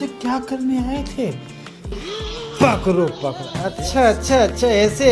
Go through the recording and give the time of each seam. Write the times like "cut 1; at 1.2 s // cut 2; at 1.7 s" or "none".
cut 1; at 1.9 s